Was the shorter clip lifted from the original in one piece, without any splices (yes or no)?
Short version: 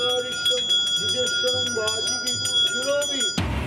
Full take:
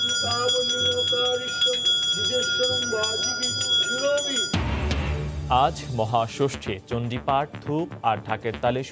yes